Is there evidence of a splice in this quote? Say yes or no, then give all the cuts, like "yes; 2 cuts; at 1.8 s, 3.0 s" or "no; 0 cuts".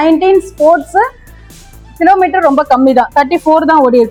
no; 0 cuts